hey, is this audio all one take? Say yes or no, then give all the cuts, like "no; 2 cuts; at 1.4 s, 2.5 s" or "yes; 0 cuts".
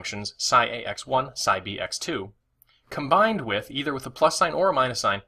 no; 1 cut; at 4.4 s